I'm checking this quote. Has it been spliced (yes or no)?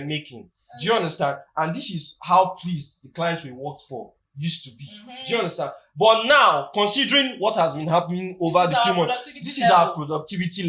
no